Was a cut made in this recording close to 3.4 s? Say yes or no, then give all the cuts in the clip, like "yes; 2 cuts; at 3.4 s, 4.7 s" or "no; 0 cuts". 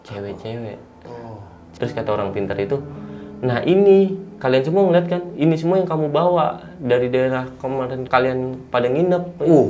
no; 2 cuts; at 1.8 s, 8.0 s